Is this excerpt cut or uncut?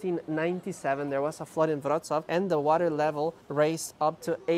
cut